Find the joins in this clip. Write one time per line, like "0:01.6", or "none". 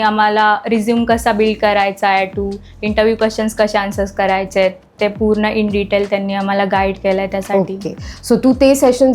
none